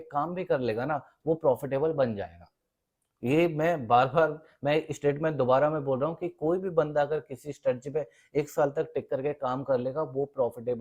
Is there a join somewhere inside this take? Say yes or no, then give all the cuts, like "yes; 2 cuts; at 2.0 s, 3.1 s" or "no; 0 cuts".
no; 0 cuts